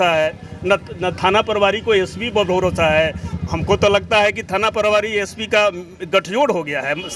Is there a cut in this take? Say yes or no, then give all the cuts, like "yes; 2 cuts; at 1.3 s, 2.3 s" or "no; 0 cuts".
no; 0 cuts